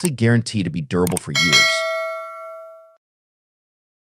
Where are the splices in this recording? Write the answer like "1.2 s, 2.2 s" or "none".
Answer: 1.6 s